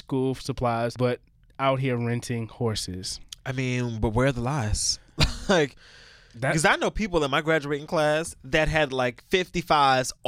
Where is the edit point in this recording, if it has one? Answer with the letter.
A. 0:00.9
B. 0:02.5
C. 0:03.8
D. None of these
A